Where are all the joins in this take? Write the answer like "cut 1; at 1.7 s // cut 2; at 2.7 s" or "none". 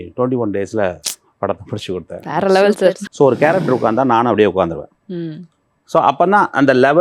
cut 1; at 3.0 s

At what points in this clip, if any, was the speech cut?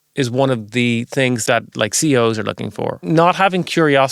cut 1; at 1.4 s // cut 2; at 3.1 s

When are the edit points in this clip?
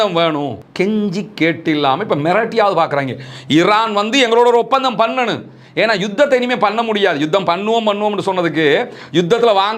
none

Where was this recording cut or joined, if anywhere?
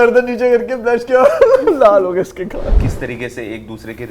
cut 1; at 2.8 s

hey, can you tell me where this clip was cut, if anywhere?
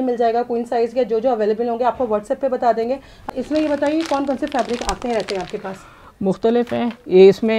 cut 1; at 3.3 s

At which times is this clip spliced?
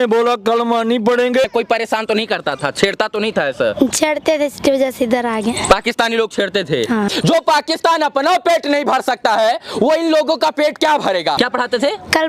cut 1; at 1.4 s // cut 2; at 7.1 s // cut 3; at 11.4 s

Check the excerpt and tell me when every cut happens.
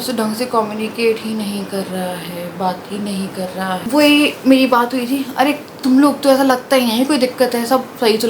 cut 1; at 3.8 s

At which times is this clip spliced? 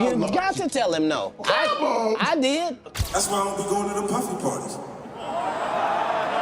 cut 1; at 2.8 s

